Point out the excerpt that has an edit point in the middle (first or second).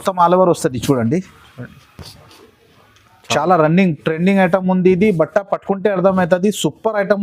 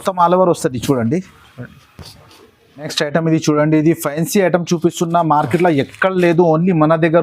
second